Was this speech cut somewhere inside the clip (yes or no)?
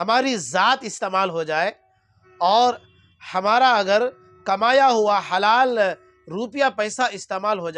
no